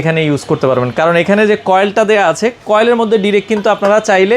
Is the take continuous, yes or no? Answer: yes